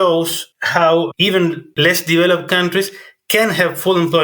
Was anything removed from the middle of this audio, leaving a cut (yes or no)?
yes